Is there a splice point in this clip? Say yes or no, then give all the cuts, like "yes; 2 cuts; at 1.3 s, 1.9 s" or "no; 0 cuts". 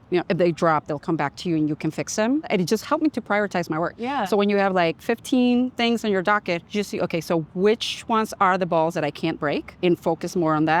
yes; 3 cuts; at 2.5 s, 6.6 s, 9.7 s